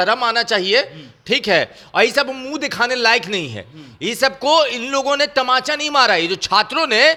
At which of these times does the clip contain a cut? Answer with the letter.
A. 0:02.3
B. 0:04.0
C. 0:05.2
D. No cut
D